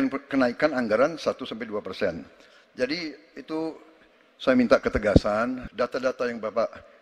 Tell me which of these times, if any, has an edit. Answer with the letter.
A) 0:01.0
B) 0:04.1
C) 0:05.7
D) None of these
C